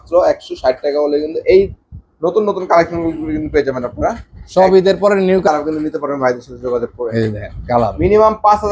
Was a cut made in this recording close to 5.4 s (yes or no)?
yes